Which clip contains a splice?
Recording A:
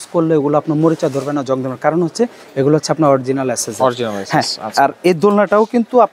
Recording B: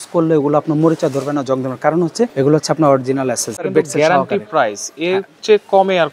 B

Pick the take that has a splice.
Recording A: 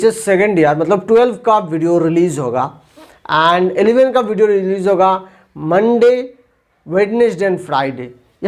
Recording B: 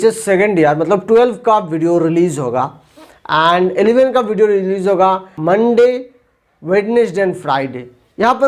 B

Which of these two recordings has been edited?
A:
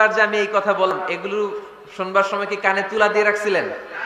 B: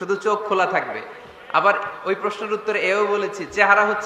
A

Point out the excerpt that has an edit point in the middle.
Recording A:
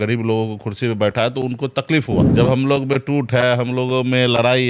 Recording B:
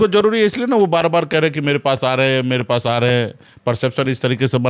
A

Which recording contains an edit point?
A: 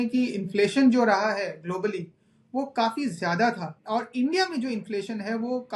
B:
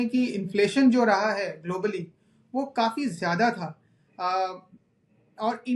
A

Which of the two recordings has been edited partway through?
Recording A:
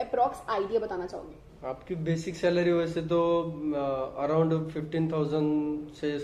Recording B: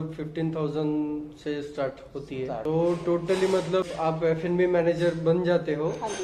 B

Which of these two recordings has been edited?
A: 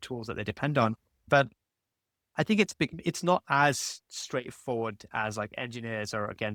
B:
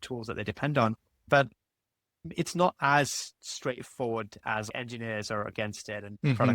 B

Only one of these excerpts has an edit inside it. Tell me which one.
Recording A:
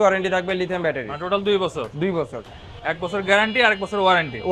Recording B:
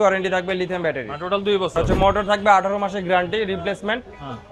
B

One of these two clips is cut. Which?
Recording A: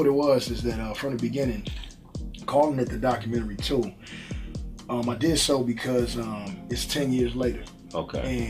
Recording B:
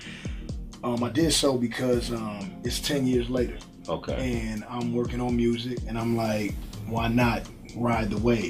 A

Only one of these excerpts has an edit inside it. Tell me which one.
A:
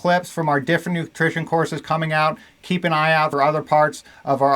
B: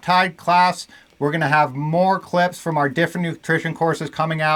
A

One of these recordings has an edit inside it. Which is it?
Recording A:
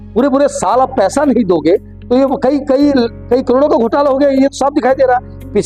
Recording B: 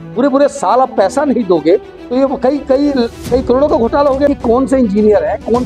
B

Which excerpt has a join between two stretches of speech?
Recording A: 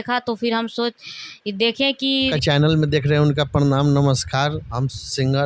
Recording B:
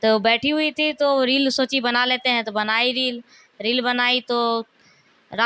A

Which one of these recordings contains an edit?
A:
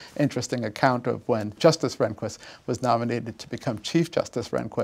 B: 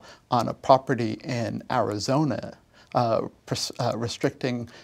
A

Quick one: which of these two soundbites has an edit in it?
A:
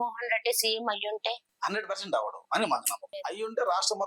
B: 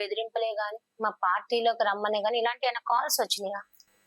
A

